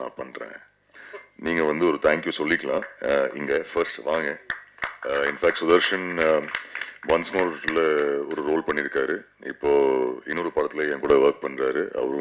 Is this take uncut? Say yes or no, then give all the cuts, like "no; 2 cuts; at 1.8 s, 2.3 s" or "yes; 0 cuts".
no; 1 cut; at 0.9 s